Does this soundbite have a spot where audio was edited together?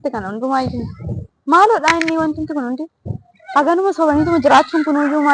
no; 0 cuts

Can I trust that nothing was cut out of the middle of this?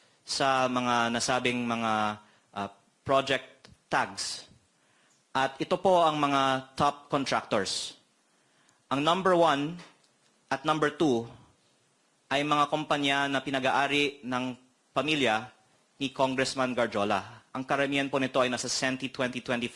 yes; 0 cuts

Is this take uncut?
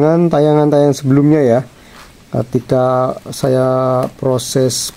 yes; 0 cuts

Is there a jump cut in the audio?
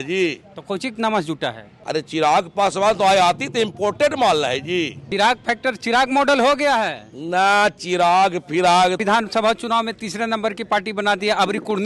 yes; 3 cuts; at 1.7 s, 5.0 s, 9.0 s

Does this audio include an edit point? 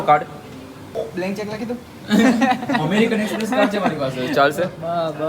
yes; 1 cut; at 0.9 s

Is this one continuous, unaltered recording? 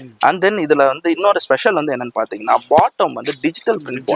yes; 0 cuts

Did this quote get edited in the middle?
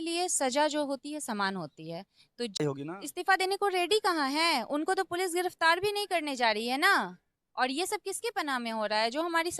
yes; 1 cut; at 2.6 s

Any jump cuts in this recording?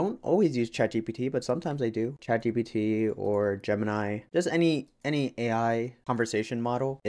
no; 0 cuts

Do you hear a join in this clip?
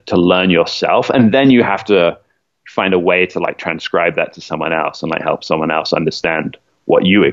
no; 0 cuts

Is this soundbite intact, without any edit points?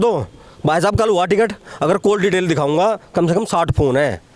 yes; 0 cuts

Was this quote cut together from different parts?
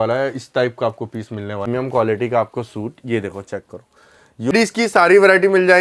yes; 2 cuts; at 1.7 s, 4.5 s

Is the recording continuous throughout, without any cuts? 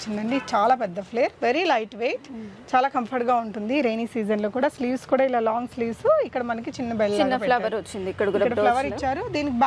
yes; 0 cuts

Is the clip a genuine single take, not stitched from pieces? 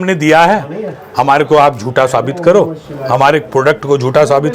yes; 0 cuts

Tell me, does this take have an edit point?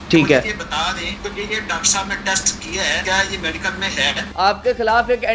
yes; 3 cuts; at 1.1 s, 3.0 s, 4.3 s

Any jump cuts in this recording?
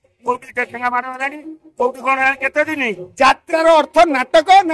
no; 0 cuts

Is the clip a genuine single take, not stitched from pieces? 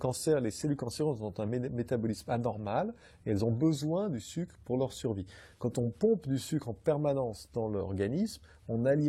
yes; 0 cuts

